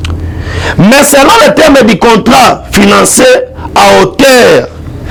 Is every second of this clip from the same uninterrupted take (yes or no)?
yes